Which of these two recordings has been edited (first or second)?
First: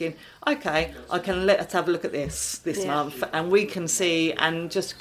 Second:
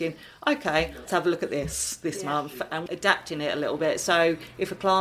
second